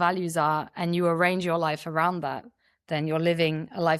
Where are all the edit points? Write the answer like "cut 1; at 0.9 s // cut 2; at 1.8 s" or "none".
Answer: none